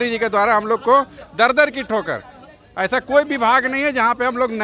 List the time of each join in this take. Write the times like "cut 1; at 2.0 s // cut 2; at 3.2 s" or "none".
none